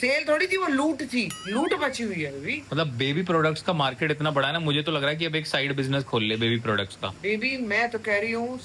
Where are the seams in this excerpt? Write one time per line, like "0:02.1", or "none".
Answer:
none